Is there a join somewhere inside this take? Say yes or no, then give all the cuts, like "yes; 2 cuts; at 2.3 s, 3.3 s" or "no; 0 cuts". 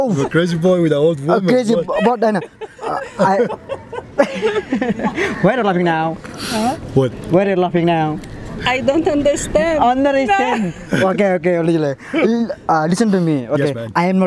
no; 0 cuts